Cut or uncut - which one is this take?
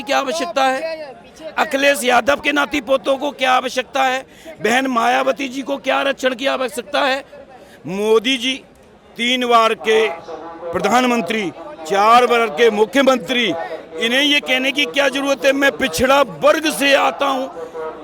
uncut